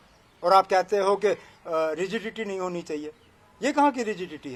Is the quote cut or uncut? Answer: uncut